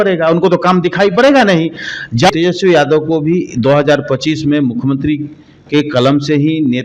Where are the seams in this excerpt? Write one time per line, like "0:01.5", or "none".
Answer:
0:02.3